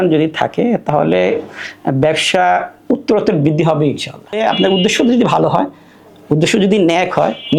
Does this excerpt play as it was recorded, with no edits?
no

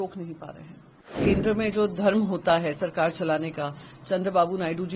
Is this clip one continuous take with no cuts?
no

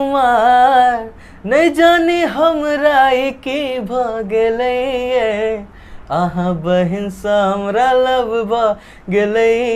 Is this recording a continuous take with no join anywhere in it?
yes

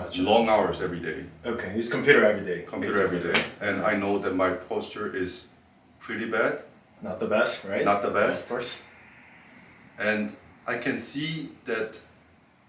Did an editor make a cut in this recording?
no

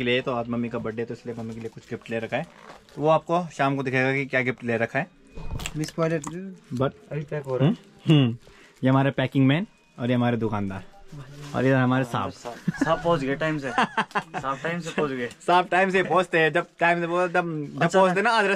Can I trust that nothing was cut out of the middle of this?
yes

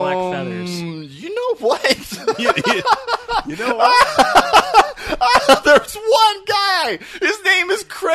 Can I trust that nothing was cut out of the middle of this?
yes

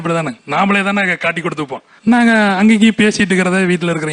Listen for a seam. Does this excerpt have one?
no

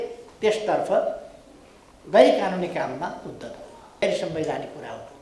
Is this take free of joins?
no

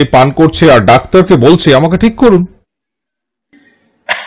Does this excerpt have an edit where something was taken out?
no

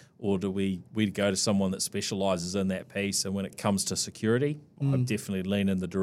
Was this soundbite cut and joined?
yes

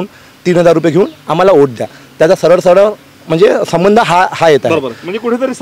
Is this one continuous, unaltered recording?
yes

